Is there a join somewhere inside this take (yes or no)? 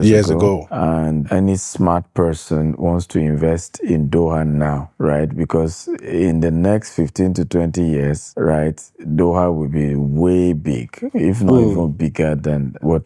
no